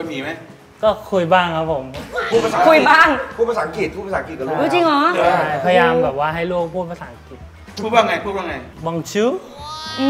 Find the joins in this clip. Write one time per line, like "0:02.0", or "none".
none